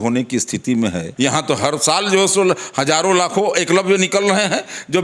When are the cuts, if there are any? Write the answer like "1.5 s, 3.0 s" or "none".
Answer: 1.1 s